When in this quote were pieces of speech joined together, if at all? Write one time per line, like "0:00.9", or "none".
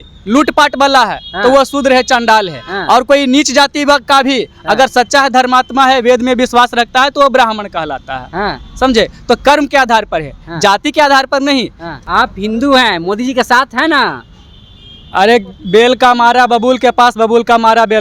0:12.0